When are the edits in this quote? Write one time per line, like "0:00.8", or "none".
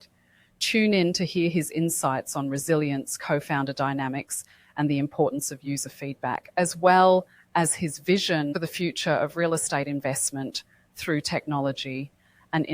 0:08.5

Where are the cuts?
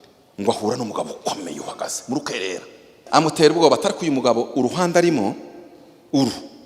0:02.9

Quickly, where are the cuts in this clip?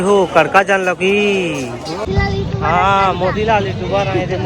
0:02.0

